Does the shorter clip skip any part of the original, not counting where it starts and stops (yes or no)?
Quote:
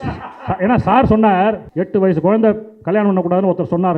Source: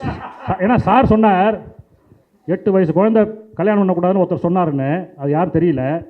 yes